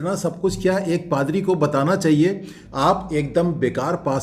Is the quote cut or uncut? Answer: cut